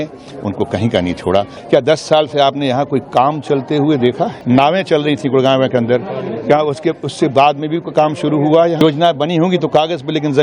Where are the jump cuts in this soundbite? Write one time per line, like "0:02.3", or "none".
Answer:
0:01.6
0:04.4
0:08.8